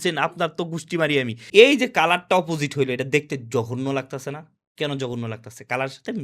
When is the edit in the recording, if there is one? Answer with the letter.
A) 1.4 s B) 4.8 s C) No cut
A